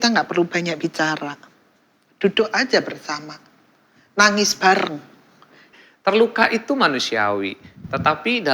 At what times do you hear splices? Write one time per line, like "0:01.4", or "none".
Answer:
0:05.7